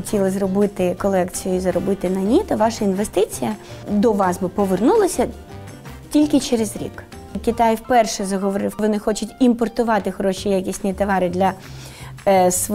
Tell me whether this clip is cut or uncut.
cut